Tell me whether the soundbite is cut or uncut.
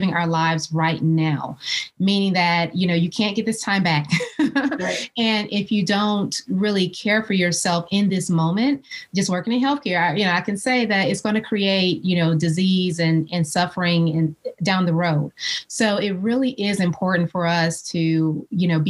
uncut